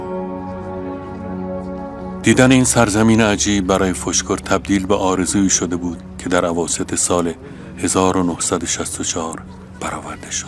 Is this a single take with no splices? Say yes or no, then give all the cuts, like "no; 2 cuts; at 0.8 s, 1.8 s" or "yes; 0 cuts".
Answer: no; 1 cut; at 1.0 s